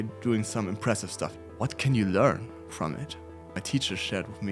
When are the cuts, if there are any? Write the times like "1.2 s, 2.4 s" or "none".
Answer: 1.3 s, 3.5 s